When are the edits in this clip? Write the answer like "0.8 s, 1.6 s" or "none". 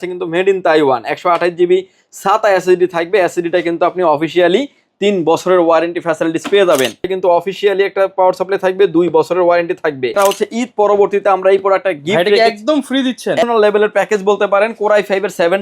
7.1 s, 10.1 s, 13.4 s